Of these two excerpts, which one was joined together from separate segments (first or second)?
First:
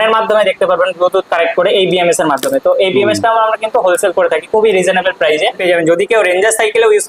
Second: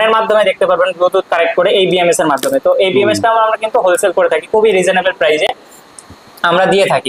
first